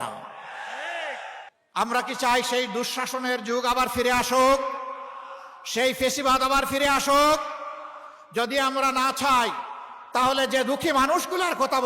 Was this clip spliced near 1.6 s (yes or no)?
yes